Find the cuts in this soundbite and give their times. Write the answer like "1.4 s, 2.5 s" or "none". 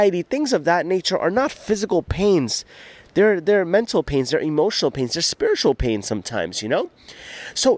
none